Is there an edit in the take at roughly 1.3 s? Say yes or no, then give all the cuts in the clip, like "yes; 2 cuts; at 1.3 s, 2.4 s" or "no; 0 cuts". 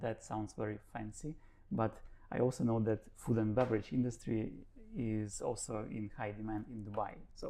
no; 0 cuts